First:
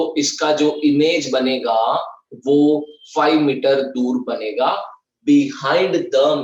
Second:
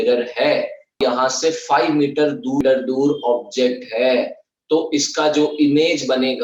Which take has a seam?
second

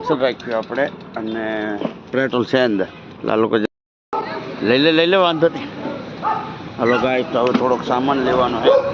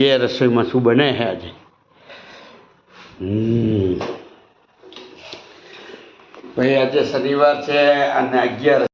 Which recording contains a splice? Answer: first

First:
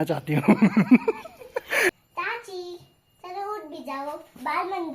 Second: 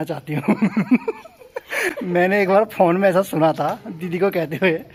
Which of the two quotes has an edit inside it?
first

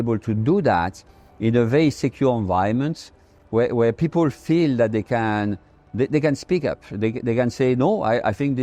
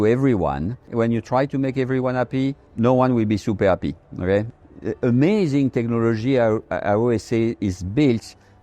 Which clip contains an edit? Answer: second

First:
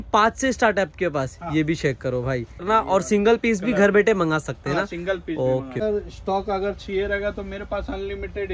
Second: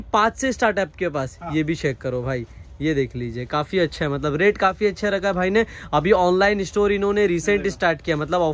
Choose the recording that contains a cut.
first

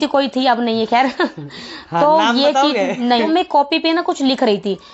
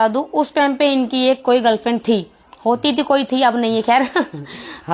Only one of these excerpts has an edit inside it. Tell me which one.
first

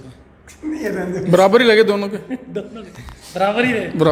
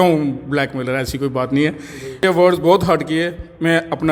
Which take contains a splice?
second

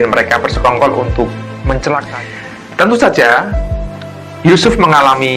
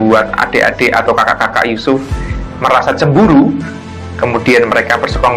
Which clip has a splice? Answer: first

